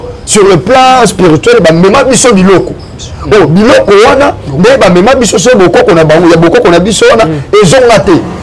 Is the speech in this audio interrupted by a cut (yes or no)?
no